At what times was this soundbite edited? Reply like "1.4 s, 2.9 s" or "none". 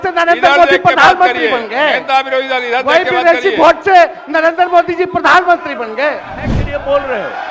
6.5 s